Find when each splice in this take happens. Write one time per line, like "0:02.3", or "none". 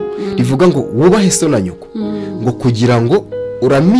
none